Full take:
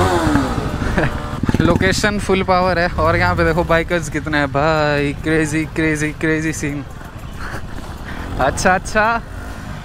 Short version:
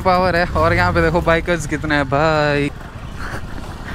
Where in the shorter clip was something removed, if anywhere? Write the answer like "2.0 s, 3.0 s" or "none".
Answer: 2.7 s